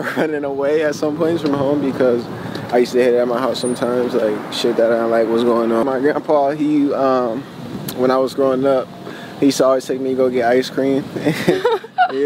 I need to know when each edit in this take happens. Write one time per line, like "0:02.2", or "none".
0:05.8